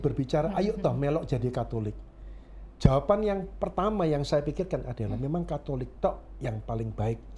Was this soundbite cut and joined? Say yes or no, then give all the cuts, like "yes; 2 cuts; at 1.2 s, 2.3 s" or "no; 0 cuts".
no; 0 cuts